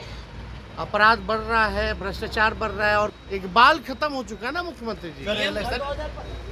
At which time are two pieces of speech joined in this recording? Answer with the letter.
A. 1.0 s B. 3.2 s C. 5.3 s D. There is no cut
B